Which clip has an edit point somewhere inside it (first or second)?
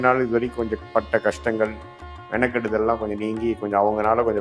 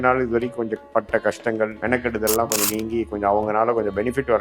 second